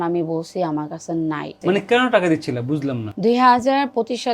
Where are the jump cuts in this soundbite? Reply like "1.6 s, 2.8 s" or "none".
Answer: 1.5 s, 3.1 s